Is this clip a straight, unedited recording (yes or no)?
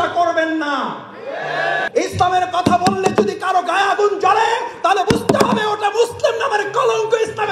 no